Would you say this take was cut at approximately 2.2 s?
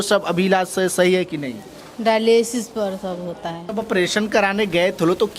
no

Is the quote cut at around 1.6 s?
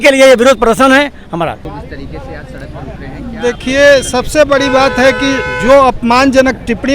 yes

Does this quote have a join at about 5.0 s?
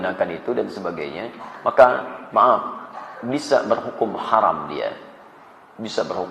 no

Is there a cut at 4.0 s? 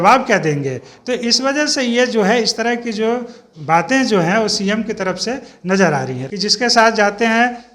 no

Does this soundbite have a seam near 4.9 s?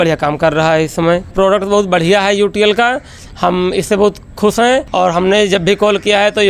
yes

